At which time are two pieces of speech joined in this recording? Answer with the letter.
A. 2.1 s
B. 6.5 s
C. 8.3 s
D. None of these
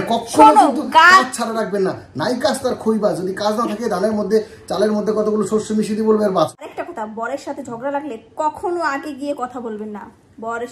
B